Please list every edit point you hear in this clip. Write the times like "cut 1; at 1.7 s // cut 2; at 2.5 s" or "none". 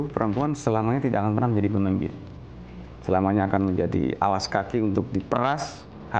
none